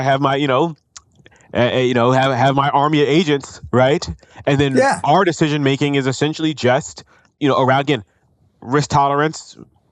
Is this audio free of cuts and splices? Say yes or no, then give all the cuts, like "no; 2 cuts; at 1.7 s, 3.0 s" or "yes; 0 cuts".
no; 1 cut; at 7.3 s